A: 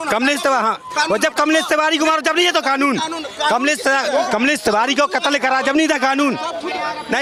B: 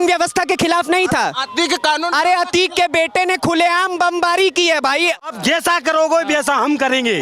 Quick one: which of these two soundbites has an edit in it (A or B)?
B